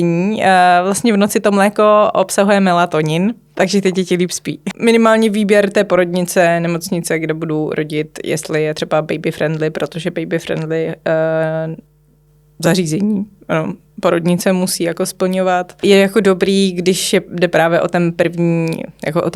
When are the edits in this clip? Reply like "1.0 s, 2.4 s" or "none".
3.5 s, 4.7 s, 15.8 s